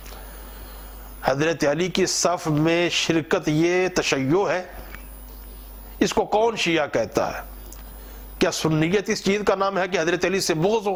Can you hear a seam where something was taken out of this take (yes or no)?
no